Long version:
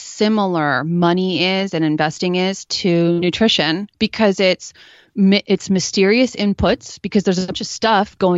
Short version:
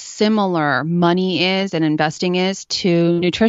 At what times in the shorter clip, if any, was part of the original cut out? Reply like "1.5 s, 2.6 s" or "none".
none